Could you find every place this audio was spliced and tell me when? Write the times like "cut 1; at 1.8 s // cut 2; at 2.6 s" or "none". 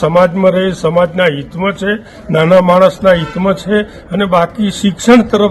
none

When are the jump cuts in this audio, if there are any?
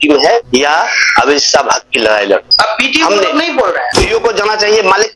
cut 1; at 3.9 s

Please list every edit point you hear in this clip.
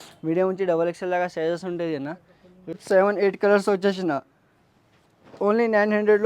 cut 1; at 2.8 s

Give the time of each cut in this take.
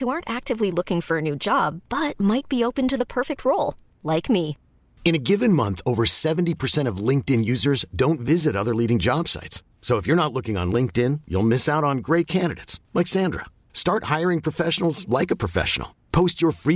none

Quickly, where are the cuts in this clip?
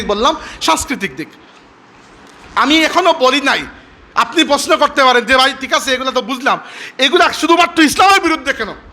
none

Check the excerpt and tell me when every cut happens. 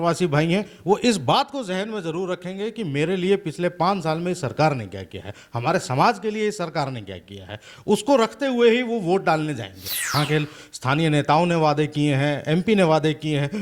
cut 1; at 10.1 s

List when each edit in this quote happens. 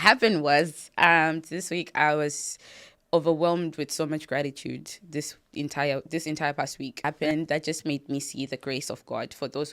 cut 1; at 7.0 s

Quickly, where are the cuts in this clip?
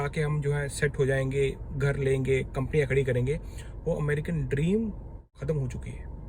cut 1; at 5.3 s

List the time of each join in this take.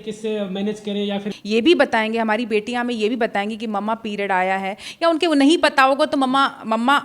cut 1; at 1.3 s

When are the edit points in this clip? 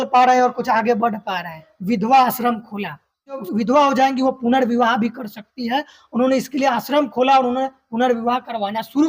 cut 1; at 1.7 s // cut 2; at 3.4 s

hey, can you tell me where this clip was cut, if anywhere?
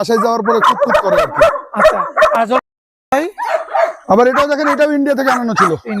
cut 1; at 2.6 s

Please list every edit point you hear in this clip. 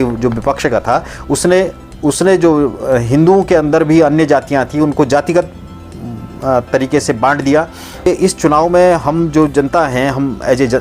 cut 1; at 8.1 s

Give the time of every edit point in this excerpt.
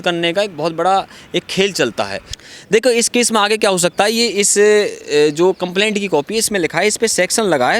cut 1; at 2.3 s

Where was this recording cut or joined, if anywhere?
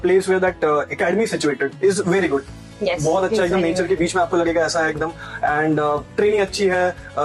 none

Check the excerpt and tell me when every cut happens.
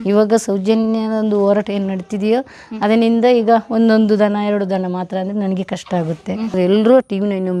cut 1; at 6.5 s

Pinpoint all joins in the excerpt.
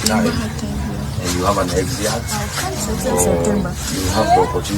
none

